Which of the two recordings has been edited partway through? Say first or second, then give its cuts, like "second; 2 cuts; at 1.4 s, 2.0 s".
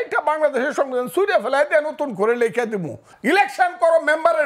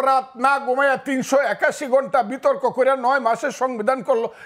first; 1 cut; at 3.1 s